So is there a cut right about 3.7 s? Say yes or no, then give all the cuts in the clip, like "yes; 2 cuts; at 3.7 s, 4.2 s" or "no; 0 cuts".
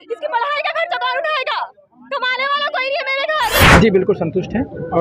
yes; 1 cut; at 3.7 s